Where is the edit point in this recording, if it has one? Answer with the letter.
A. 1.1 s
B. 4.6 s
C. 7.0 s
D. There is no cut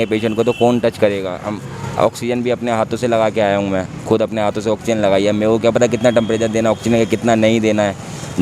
D